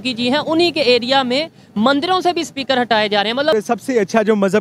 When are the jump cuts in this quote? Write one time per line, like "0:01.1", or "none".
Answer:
0:03.5